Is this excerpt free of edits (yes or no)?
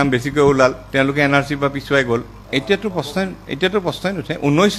no